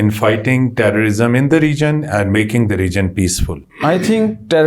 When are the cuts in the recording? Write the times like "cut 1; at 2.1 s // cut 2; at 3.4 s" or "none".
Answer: cut 1; at 3.7 s